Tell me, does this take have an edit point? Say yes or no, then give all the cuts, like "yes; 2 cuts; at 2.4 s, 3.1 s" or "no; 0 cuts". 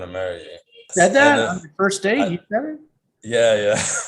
yes; 1 cut; at 0.9 s